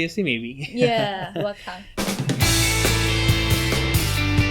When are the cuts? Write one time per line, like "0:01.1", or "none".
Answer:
0:02.0